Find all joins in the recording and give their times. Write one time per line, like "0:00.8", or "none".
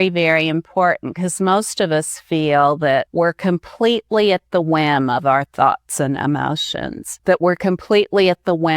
0:03.1
0:07.1